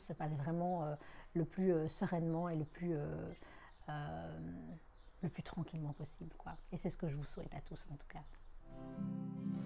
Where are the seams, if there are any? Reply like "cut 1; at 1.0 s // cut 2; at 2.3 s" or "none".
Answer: cut 1; at 8.7 s